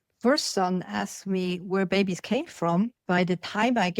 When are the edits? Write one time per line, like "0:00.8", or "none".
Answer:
0:03.0